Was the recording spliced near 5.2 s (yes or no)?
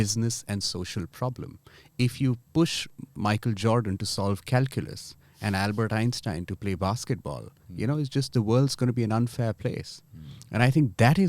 no